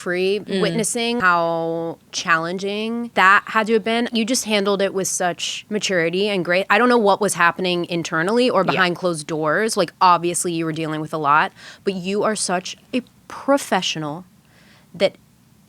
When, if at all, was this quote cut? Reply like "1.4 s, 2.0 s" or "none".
1.0 s, 3.1 s, 4.1 s, 5.5 s